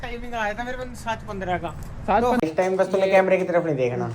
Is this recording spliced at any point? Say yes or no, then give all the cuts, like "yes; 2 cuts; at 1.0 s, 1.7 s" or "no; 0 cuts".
yes; 1 cut; at 2.4 s